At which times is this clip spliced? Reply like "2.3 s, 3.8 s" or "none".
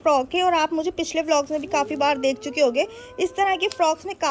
none